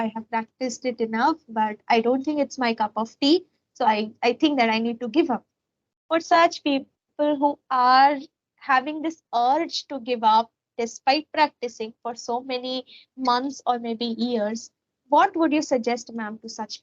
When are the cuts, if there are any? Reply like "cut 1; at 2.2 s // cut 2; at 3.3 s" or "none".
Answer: none